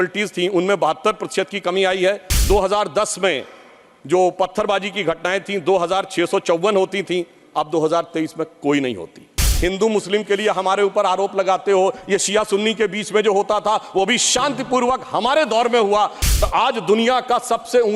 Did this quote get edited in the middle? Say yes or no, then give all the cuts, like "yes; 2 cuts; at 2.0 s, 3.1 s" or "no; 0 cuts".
yes; 3 cuts; at 2.3 s, 9.4 s, 16.2 s